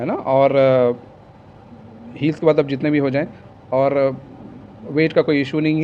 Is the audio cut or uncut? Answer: uncut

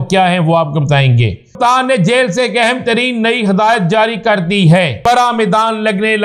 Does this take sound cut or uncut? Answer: cut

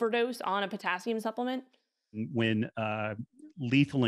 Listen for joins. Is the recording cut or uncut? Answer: cut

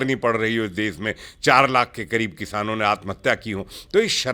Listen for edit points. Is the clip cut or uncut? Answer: uncut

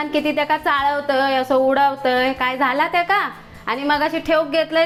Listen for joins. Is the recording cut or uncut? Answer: uncut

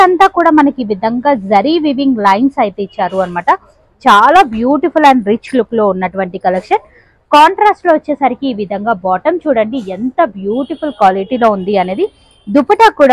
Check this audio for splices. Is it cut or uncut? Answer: uncut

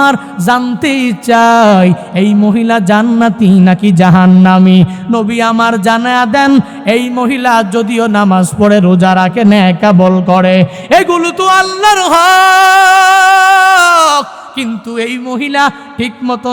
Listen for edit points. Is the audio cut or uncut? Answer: uncut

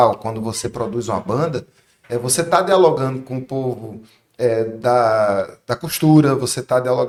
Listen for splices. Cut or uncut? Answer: uncut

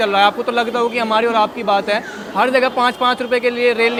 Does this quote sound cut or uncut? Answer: uncut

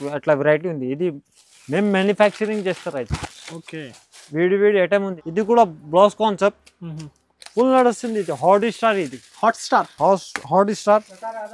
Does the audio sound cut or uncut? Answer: cut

